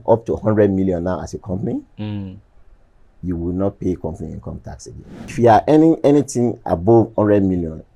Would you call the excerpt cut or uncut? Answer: cut